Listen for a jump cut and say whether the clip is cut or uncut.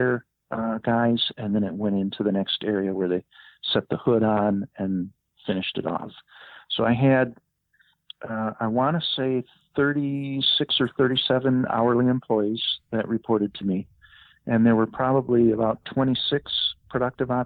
uncut